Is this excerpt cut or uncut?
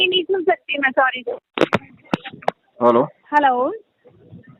uncut